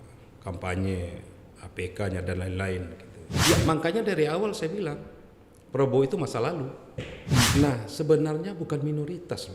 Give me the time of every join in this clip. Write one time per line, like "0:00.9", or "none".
0:03.4
0:07.5